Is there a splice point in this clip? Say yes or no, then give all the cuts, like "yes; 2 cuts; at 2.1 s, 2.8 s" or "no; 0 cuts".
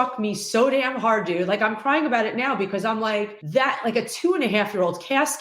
yes; 1 cut; at 3.4 s